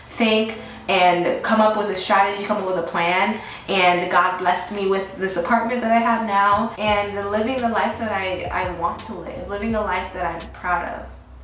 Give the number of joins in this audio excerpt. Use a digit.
1